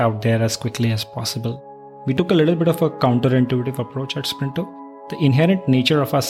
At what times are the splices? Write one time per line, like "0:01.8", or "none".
0:02.1
0:05.1

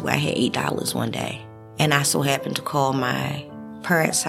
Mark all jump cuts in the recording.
0:01.7

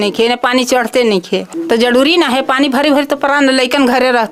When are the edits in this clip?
0:01.5

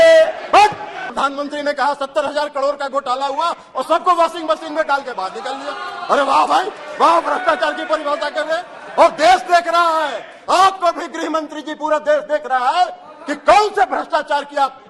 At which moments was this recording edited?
0:01.1

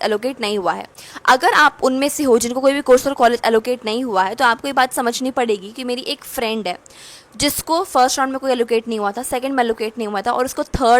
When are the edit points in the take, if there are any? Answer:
none

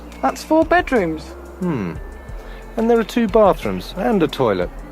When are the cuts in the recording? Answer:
0:01.4

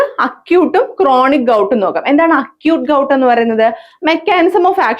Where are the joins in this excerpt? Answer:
0:03.9

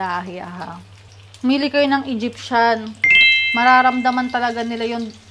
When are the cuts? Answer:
0:03.0

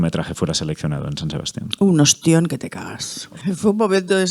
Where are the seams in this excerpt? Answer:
0:03.3

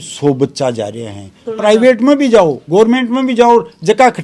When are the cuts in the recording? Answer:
0:01.4

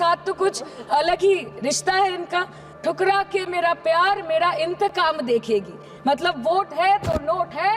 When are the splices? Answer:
0:02.6

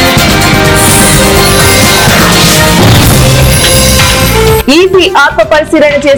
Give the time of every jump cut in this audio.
none

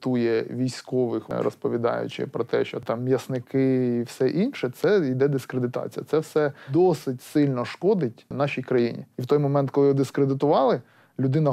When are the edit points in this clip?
0:01.3
0:02.8
0:06.6
0:08.3
0:09.2

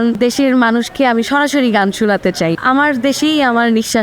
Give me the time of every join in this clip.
0:02.6

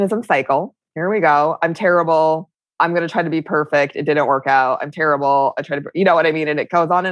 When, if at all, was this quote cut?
0:02.6

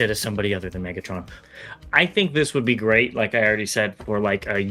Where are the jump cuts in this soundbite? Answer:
0:01.4

